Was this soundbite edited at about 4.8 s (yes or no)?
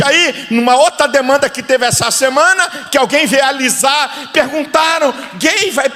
no